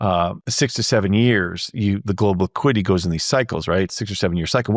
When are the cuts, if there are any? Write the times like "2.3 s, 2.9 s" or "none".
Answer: none